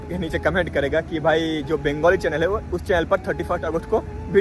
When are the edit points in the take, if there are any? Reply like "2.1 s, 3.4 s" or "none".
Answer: none